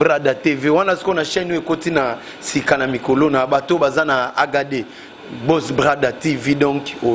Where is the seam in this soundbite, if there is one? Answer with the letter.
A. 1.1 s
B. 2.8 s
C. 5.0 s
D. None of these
D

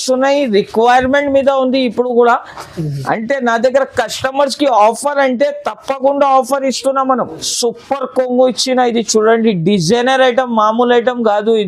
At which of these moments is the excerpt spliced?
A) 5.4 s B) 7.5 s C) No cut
B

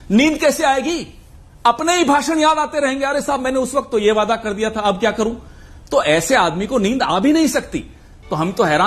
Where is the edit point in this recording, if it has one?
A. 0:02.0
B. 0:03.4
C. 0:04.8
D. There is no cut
C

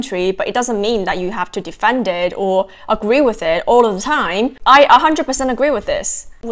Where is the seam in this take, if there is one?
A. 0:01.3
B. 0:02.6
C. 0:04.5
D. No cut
C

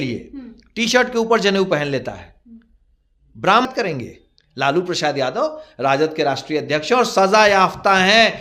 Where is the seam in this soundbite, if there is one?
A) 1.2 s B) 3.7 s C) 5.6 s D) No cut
B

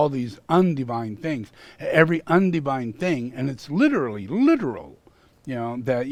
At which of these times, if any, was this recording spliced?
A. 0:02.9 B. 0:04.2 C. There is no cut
C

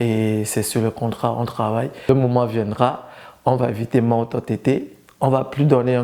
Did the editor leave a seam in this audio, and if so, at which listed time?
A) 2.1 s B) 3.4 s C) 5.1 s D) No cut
A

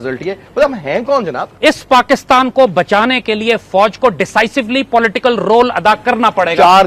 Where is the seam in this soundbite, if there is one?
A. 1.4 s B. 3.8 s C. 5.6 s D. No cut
A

